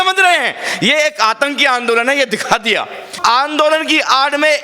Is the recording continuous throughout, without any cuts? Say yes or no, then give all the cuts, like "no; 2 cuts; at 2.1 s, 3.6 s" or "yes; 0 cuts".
no; 1 cut; at 3.1 s